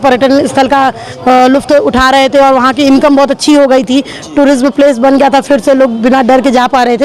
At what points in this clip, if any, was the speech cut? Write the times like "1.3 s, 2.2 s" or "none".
none

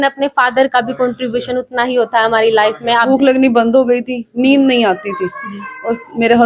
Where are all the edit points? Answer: 3.1 s

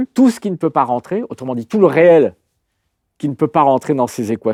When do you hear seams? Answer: none

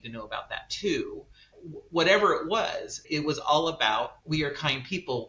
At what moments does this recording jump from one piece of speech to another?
1.6 s, 3.0 s, 4.2 s

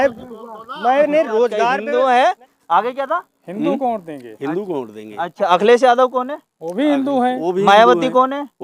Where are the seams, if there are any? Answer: 1.8 s

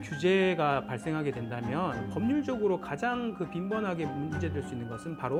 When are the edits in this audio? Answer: none

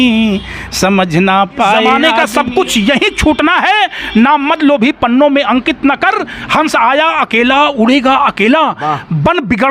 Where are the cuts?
1.9 s

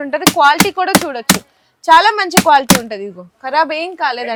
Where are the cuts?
none

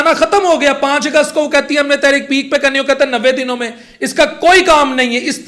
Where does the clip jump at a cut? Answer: none

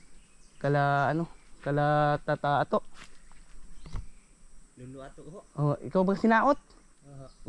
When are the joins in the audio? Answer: none

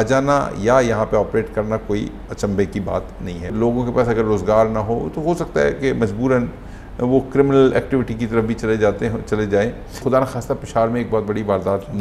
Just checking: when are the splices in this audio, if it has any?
3.5 s, 10.0 s

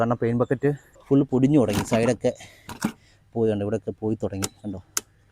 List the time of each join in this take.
0.9 s

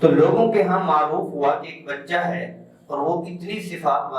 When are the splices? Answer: none

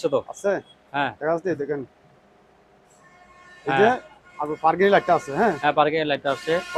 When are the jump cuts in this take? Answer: none

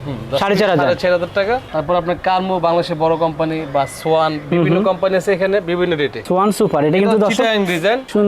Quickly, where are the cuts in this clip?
1.7 s, 6.2 s

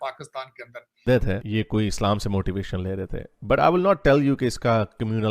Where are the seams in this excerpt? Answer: 1.0 s

